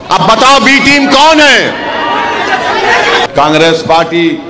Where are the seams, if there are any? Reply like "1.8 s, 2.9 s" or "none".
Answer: 3.3 s